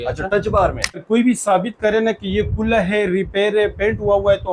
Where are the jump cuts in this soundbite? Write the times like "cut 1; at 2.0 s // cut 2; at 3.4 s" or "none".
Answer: cut 1; at 1.0 s

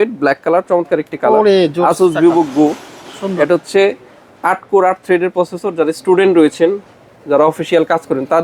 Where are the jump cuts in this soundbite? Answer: none

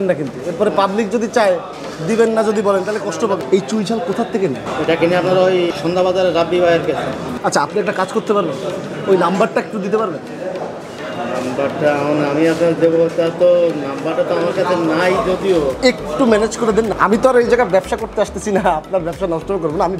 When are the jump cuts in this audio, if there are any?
cut 1; at 3.4 s // cut 2; at 4.6 s // cut 3; at 5.7 s // cut 4; at 16.9 s

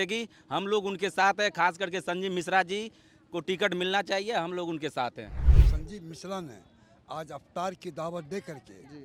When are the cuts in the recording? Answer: cut 1; at 5.5 s

